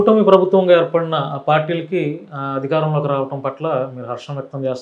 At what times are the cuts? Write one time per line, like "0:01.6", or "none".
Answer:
none